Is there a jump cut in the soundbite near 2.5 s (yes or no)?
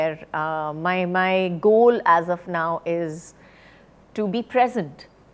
no